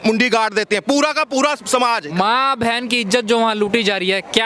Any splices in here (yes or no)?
yes